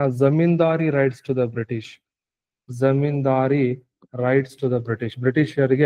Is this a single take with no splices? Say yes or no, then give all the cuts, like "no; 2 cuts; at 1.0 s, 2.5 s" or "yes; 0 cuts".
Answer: yes; 0 cuts